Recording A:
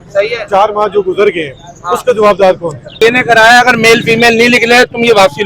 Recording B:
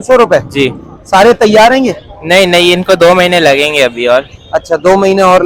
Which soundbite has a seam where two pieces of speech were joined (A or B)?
A